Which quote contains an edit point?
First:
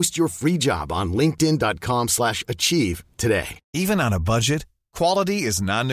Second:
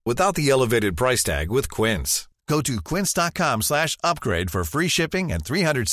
first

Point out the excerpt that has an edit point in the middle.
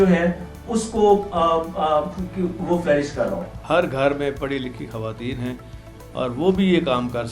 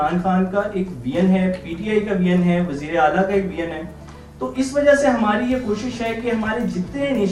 first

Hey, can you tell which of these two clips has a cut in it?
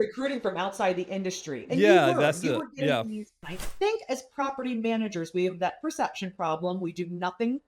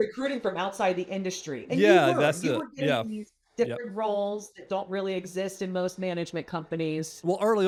first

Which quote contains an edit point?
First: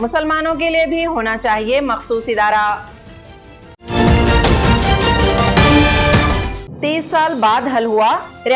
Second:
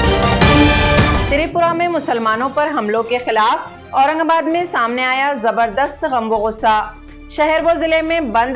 second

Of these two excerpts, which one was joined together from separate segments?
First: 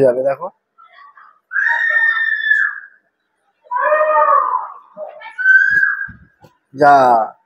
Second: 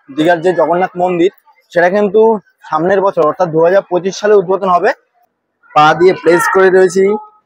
second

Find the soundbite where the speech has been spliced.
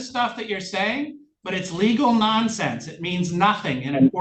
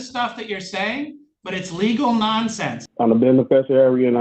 second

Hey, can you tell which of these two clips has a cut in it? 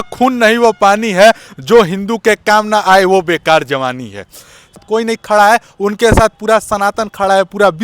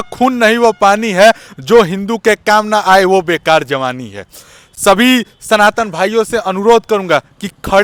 first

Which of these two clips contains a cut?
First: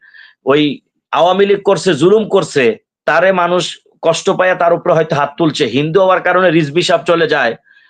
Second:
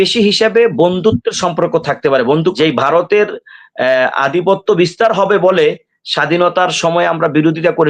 second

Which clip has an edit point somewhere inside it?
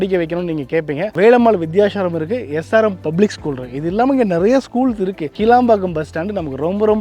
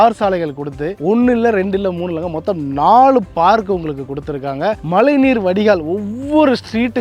first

